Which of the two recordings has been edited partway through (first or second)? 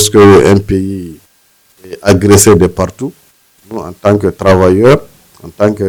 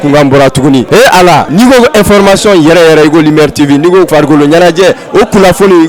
second